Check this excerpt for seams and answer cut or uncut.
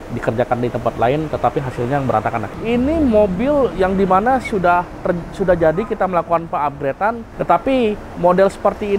cut